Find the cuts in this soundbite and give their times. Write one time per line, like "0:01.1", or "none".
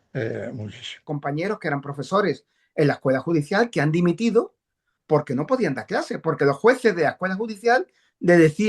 0:01.1